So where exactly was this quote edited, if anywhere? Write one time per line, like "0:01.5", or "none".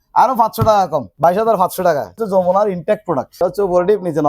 0:01.1
0:02.2
0:03.3